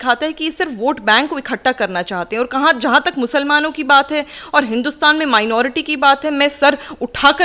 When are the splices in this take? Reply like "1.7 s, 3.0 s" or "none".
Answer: none